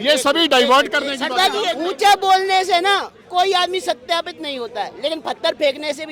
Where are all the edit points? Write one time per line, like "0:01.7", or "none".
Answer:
0:01.7